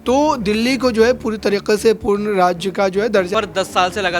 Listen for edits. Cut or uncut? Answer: cut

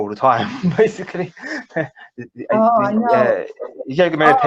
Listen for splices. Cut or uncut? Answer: cut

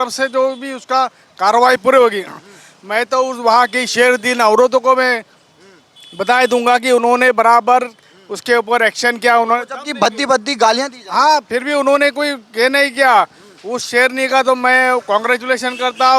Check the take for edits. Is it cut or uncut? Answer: uncut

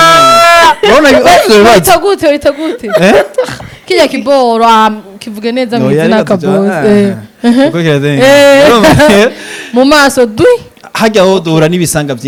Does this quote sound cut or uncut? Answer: uncut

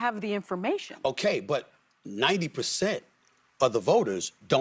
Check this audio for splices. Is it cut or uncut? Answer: uncut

